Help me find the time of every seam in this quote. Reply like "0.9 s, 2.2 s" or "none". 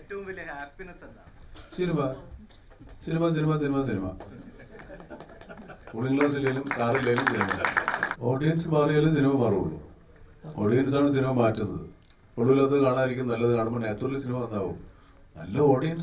8.1 s